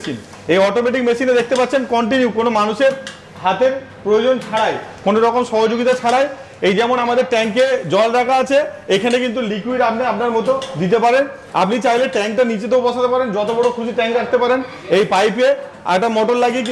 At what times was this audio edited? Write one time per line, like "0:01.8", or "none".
none